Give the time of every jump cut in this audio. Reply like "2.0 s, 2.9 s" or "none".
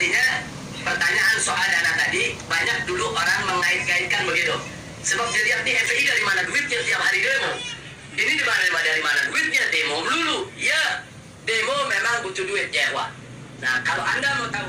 none

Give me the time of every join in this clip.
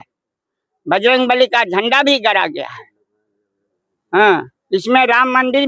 none

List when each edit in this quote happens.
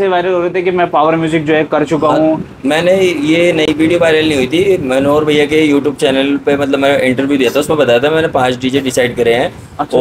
none

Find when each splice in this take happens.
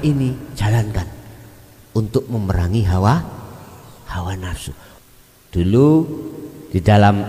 4.9 s

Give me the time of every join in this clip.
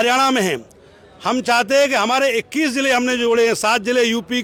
none

